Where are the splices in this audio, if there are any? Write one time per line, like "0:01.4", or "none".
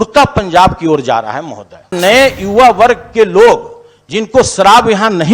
0:01.9

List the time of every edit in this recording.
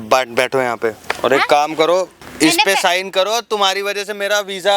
0:01.1
0:02.2

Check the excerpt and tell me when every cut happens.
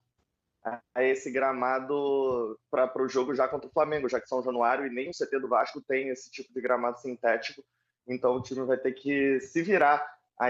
none

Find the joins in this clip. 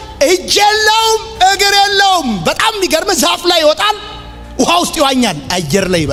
none

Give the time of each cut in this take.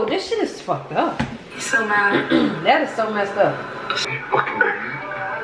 0:04.0

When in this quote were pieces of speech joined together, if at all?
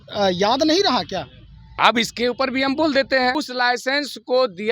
0:03.3

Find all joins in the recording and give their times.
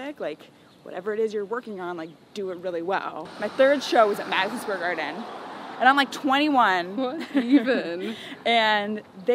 0:03.3

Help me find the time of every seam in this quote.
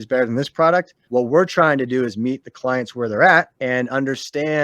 0:01.0
0:03.5

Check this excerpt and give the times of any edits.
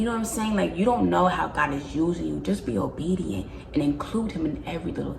none

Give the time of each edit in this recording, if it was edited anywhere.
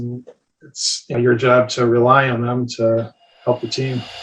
0:01.1
0:03.3

